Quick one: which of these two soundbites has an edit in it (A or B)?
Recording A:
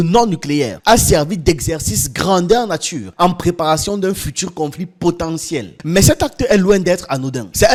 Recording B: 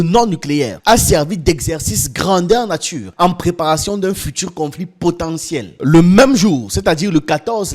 B